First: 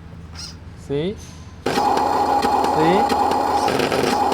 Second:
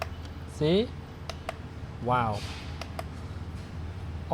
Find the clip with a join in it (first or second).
first